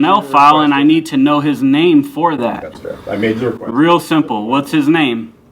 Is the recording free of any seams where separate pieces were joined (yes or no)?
yes